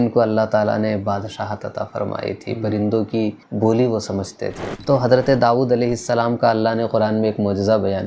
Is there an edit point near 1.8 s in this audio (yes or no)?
no